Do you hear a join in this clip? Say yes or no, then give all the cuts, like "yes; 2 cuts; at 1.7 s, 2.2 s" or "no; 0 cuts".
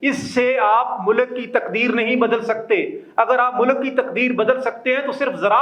no; 0 cuts